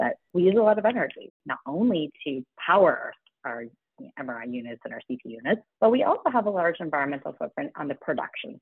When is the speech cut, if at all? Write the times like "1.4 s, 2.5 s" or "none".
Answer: 1.4 s, 5.6 s